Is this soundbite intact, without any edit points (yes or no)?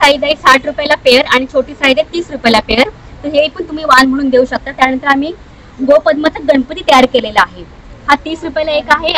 yes